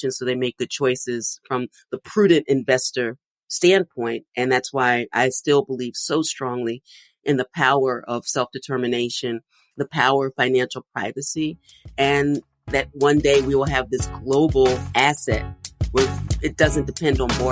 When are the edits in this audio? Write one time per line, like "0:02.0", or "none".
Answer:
none